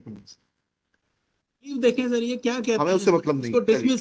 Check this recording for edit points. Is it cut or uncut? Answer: cut